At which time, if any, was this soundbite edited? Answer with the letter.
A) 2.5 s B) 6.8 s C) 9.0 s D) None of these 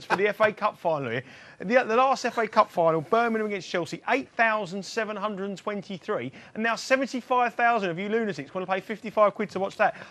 C